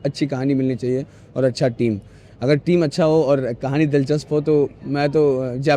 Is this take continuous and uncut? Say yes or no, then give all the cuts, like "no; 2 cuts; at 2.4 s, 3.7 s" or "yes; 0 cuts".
yes; 0 cuts